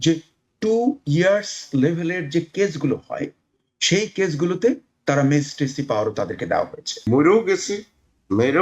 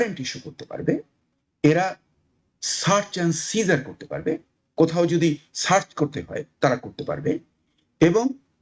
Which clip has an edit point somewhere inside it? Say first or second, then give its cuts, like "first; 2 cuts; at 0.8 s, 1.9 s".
first; 1 cut; at 7.0 s